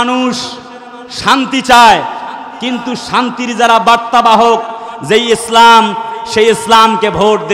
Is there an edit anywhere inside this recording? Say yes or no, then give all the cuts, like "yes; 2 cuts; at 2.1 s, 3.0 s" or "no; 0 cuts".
no; 0 cuts